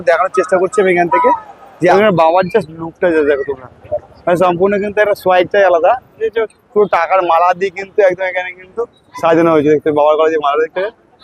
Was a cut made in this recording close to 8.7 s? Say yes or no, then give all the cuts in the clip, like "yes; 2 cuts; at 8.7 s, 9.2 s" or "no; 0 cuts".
no; 2 cuts; at 1.9 s, 6.1 s